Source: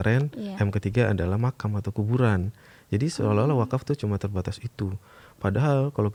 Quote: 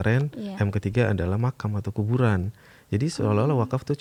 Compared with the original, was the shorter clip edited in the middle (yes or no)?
no